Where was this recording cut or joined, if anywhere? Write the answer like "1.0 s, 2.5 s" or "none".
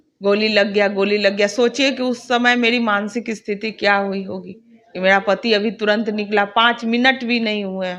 none

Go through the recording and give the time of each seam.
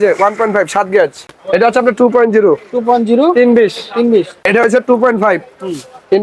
1.3 s, 4.4 s

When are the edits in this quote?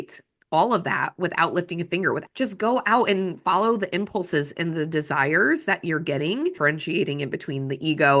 2.2 s, 6.6 s

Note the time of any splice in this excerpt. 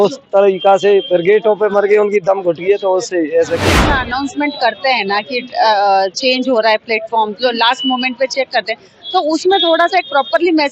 3.9 s

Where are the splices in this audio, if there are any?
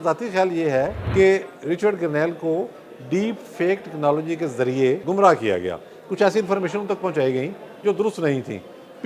1.0 s, 5.0 s

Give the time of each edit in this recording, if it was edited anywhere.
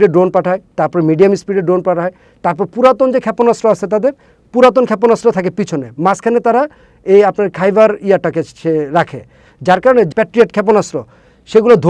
10.1 s

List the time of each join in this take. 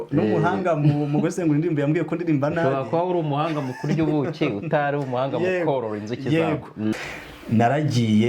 6.9 s

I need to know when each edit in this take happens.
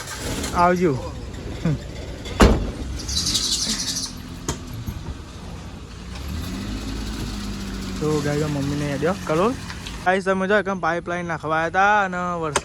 10.1 s

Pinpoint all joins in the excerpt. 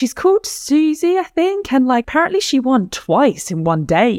2.1 s

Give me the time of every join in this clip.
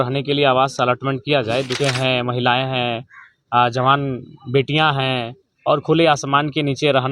1.7 s

